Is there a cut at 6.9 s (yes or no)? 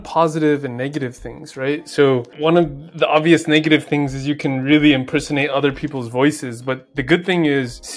no